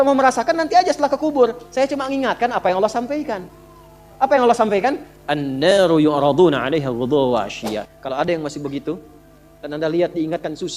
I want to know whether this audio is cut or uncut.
cut